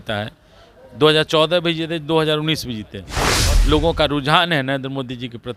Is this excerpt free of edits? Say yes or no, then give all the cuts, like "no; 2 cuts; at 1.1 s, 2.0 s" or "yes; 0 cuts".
no; 1 cut; at 3.3 s